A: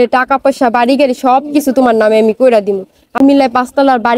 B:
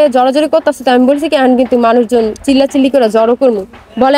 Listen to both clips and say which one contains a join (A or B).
A